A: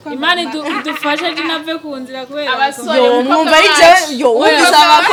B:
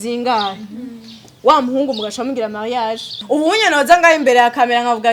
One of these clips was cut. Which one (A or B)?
B